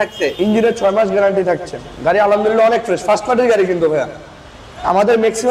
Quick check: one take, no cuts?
yes; 0 cuts

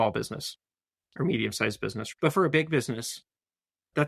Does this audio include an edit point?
yes; 1 cut; at 2.0 s

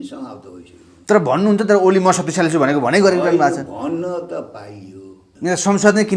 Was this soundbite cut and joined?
yes; 1 cut; at 5.2 s

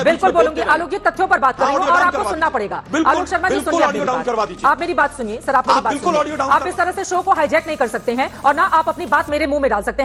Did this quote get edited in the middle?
no; 0 cuts

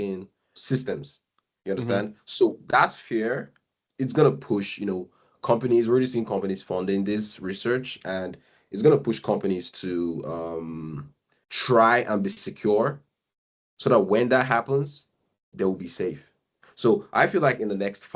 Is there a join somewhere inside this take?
no; 0 cuts

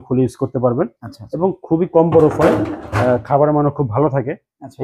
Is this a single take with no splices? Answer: yes; 0 cuts

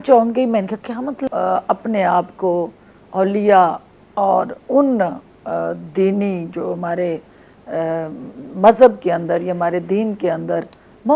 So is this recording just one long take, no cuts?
no; 1 cut; at 1.2 s

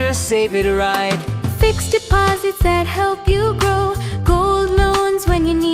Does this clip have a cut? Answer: no; 0 cuts

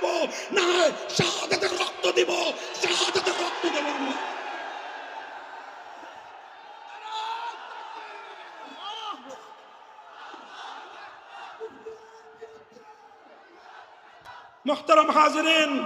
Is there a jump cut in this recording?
yes; 1 cut; at 14.5 s

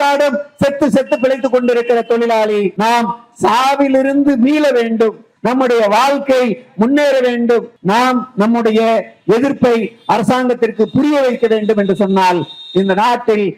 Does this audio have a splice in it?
yes; 3 cuts; at 2.7 s, 5.3 s, 7.7 s

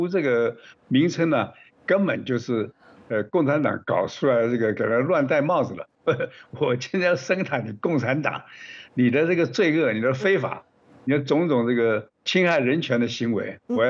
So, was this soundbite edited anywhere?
yes; 2 cuts; at 5.9 s, 12.2 s

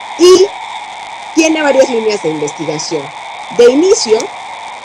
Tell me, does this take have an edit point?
yes; 1 cut; at 3.1 s

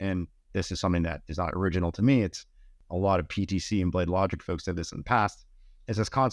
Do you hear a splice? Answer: no; 0 cuts

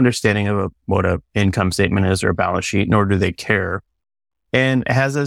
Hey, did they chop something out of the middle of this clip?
no; 0 cuts

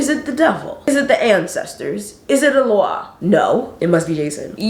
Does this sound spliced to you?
yes; 1 cut; at 3.7 s

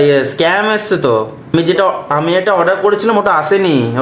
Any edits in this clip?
yes; 1 cut; at 1.5 s

